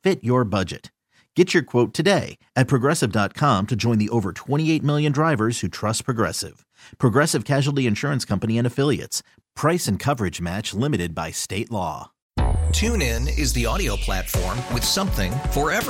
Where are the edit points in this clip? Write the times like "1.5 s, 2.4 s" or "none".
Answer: 12.1 s